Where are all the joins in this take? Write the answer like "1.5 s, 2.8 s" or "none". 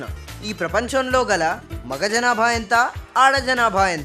none